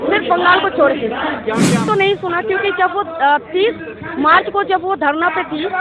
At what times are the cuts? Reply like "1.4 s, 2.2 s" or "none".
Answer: 1.8 s